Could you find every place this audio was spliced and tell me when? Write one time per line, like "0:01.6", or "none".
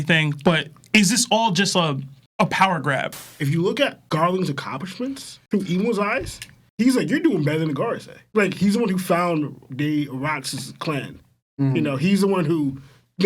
0:03.2